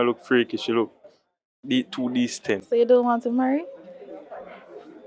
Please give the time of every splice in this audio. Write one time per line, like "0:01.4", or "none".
none